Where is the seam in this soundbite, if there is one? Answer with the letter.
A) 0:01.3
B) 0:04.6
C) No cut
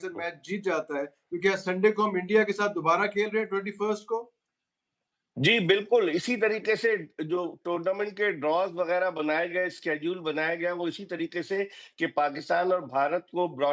C